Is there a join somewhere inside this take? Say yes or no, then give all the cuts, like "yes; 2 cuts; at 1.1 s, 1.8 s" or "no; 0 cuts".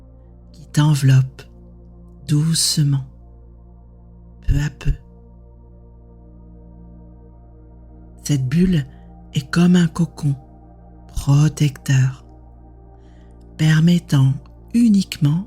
yes; 4 cuts; at 5.1 s, 8.3 s, 12.2 s, 13.6 s